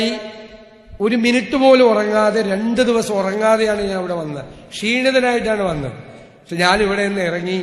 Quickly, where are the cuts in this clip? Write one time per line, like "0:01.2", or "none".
none